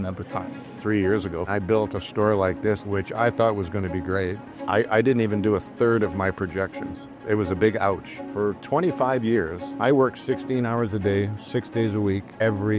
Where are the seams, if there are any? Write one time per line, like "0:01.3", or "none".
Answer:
0:01.4
0:02.8
0:04.5
0:07.2
0:08.2